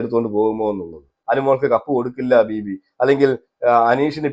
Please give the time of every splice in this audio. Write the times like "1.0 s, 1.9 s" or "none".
1.2 s